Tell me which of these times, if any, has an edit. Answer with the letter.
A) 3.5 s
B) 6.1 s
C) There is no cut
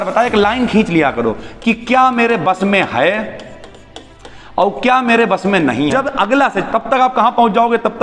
B